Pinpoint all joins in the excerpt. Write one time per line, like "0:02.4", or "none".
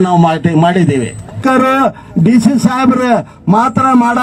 0:01.4